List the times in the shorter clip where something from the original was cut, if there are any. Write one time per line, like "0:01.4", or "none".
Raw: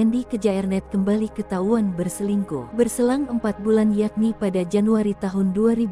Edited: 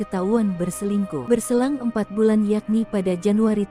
0:01.2